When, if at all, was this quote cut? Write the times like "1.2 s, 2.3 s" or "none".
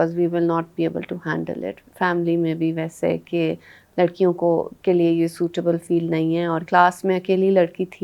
1.8 s, 6.6 s